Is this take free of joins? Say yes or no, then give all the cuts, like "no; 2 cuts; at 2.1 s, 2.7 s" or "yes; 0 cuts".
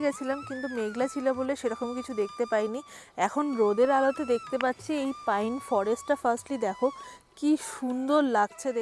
yes; 0 cuts